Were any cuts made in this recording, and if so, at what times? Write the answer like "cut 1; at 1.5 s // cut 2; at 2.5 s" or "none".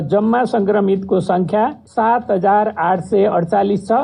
cut 1; at 1.8 s